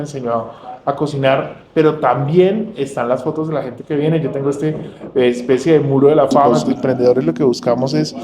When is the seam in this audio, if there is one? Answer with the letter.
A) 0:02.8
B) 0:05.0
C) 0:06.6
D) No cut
C